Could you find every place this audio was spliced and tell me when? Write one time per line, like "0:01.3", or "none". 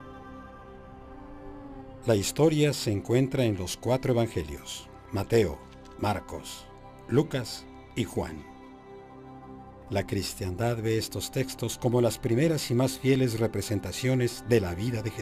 none